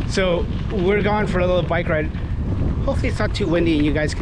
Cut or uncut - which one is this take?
uncut